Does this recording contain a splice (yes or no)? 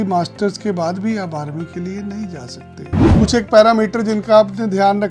yes